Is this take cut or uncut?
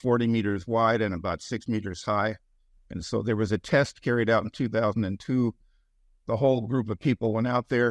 uncut